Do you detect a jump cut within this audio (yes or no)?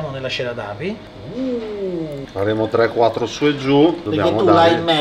yes